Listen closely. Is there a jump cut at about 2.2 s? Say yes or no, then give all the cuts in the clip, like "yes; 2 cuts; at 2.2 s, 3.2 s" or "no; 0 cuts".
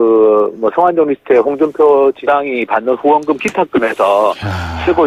no; 0 cuts